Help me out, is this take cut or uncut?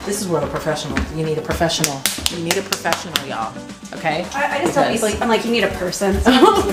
uncut